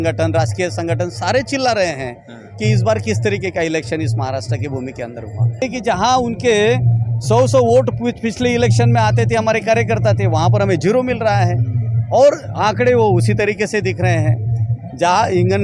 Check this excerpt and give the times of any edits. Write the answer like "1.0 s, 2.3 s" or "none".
5.6 s